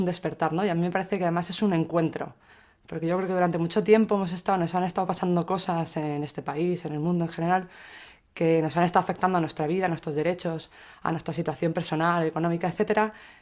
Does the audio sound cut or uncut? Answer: uncut